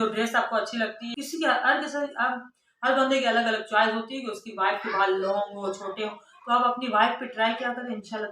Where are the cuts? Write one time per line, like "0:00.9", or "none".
0:01.1

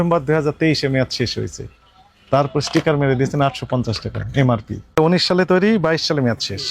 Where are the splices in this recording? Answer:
0:04.9

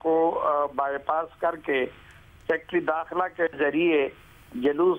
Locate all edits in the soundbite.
none

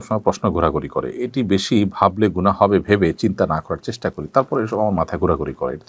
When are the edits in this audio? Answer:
none

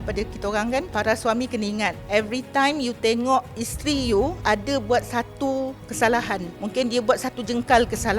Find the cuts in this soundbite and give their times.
0:00.9
0:06.5

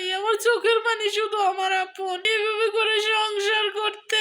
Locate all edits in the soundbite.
0:02.2

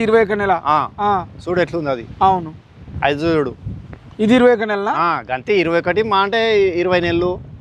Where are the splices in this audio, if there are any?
none

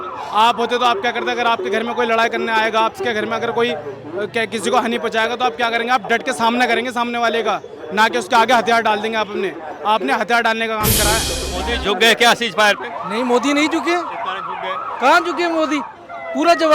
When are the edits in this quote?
0:11.4

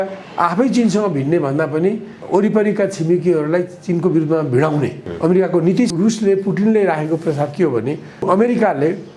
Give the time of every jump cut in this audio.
0:02.2
0:05.0
0:05.9
0:08.2

